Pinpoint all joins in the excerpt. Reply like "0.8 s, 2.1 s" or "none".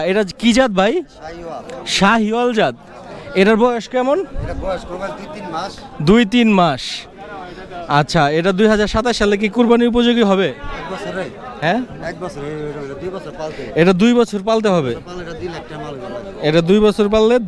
none